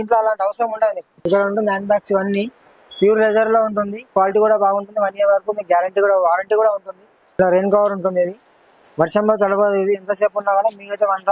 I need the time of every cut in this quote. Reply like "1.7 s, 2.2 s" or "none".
1.1 s, 7.2 s